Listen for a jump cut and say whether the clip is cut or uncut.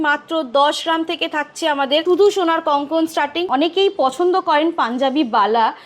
cut